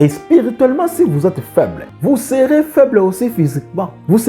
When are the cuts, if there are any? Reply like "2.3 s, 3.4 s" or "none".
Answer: 1.9 s